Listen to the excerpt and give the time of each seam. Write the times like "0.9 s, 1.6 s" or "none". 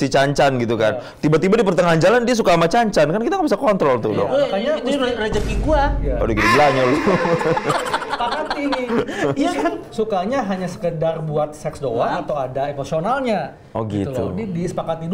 none